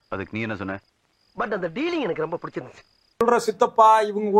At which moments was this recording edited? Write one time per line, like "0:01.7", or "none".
0:03.2